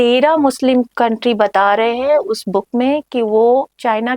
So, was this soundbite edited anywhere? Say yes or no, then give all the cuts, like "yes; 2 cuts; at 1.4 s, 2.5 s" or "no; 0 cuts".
yes; 1 cut; at 0.9 s